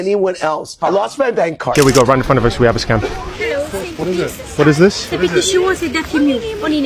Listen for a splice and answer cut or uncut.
cut